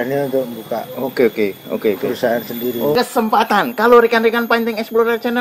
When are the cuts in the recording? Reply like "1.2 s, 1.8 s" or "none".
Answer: 2.9 s

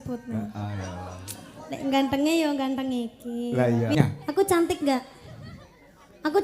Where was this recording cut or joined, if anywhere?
4.0 s

